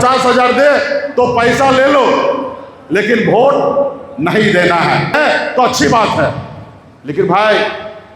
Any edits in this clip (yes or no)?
yes